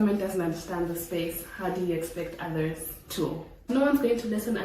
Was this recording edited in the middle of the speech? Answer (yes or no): yes